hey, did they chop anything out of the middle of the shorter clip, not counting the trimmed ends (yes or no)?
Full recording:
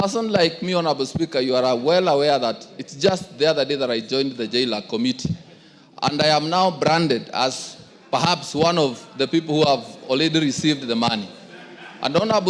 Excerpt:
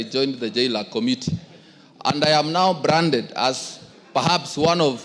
no